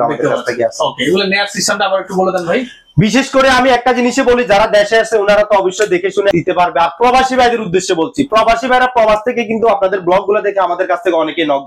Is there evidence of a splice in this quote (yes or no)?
no